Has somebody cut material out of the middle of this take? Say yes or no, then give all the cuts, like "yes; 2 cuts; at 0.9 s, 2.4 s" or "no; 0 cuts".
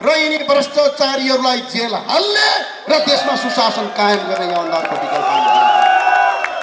no; 0 cuts